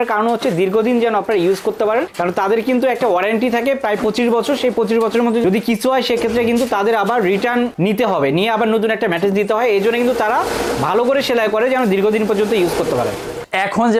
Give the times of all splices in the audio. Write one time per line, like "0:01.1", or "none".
none